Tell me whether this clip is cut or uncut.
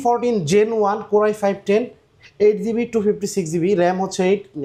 uncut